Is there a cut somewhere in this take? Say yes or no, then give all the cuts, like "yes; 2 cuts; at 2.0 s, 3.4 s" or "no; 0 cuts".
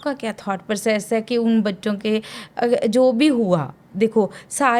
no; 0 cuts